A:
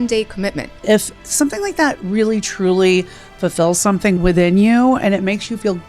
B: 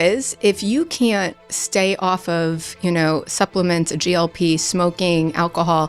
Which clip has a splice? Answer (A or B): A